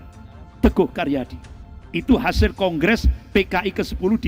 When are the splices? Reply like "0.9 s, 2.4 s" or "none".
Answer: none